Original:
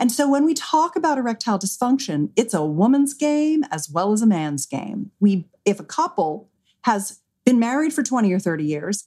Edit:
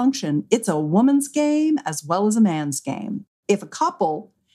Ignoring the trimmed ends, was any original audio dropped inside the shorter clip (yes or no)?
yes